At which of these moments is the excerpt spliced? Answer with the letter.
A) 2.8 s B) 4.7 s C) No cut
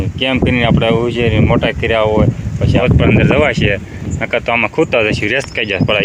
A